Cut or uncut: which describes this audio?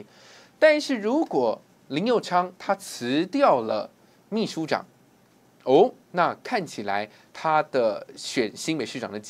uncut